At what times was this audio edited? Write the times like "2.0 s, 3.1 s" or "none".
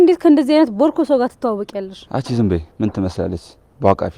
2.0 s, 3.1 s